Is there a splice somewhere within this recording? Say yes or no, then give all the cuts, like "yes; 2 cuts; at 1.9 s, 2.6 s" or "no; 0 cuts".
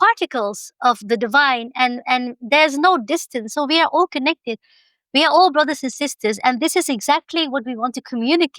no; 0 cuts